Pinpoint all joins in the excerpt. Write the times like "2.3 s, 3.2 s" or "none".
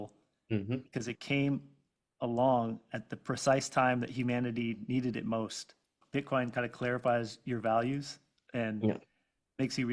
6.0 s